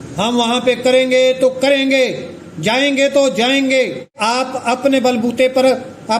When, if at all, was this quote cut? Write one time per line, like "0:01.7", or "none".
0:04.1